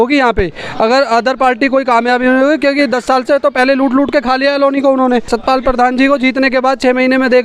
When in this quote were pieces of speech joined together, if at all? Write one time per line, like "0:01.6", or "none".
0:05.3